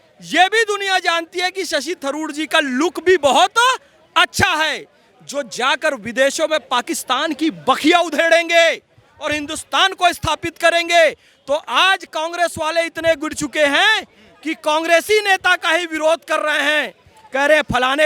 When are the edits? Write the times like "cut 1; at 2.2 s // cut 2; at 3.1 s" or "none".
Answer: none

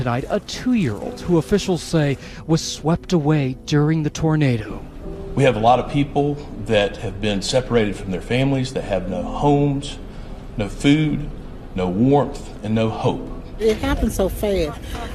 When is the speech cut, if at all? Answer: cut 1; at 6.9 s

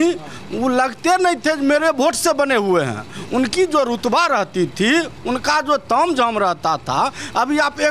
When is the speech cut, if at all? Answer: none

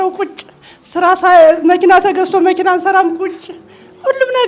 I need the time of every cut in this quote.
none

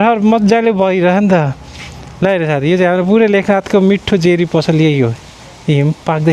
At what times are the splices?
none

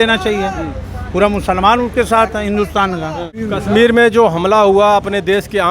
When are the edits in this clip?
cut 1; at 3.3 s

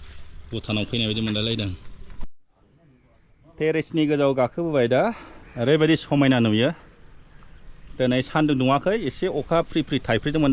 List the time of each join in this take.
none

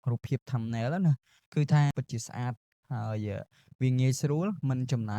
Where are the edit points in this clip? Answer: cut 1; at 1.9 s

